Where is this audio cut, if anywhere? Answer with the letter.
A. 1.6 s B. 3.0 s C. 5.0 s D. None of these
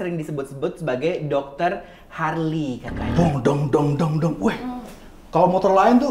B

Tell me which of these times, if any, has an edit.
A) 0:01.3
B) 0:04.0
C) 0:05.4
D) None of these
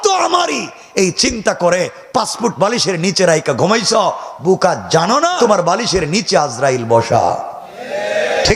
C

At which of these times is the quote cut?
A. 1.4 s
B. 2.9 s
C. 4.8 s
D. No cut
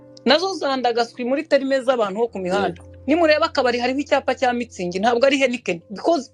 B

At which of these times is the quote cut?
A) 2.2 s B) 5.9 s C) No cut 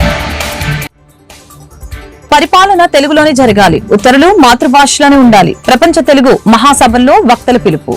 A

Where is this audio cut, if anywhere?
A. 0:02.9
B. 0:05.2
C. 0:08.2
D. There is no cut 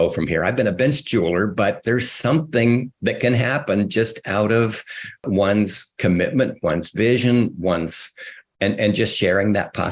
B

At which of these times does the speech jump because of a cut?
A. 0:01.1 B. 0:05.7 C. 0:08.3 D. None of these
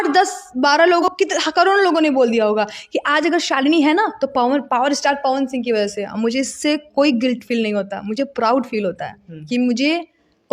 A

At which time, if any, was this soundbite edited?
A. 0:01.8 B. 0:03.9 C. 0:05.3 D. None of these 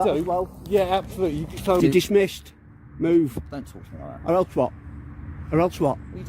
A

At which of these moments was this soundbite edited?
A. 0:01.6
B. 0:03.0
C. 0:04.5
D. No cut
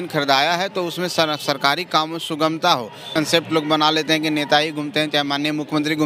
B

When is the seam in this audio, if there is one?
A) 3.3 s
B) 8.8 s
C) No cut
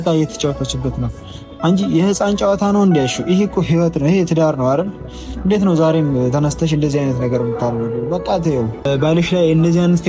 B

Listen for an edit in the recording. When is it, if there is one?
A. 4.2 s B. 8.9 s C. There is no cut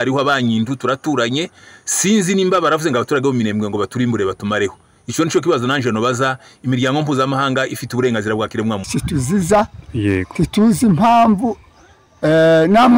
B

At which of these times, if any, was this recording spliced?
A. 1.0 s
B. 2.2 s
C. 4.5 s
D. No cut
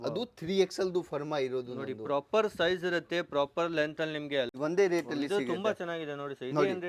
C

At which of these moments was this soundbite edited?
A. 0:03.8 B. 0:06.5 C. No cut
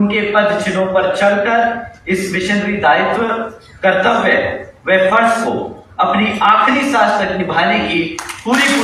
C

